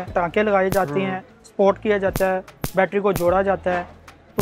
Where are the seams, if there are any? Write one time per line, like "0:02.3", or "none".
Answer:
none